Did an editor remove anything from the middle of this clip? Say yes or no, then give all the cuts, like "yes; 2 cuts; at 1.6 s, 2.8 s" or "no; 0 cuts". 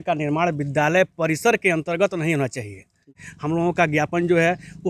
yes; 1 cut; at 3.2 s